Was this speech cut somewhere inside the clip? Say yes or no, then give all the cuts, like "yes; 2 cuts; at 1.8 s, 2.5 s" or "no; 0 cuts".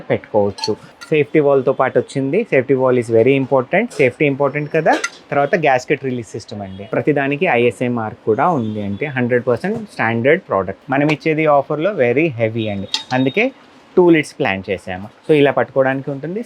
yes; 3 cuts; at 0.9 s, 6.7 s, 10.8 s